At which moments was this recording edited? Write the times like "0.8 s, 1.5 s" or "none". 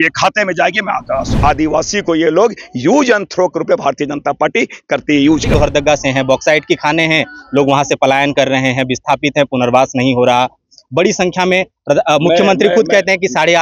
1.3 s, 5.5 s